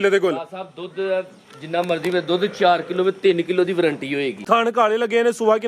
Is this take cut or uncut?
cut